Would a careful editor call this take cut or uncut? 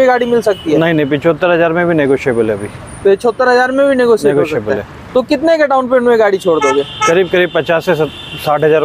uncut